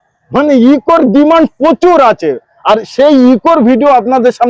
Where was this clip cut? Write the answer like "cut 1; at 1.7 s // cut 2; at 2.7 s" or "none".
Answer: none